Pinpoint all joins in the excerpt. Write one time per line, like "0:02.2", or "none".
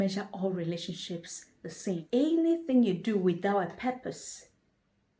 0:02.0